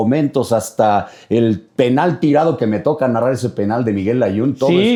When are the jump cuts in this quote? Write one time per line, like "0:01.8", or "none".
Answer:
none

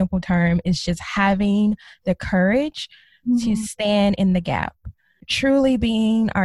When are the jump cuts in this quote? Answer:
0:05.2

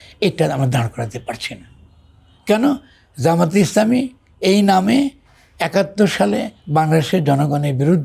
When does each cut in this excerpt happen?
none

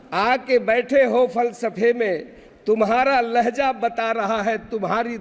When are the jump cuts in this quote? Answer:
none

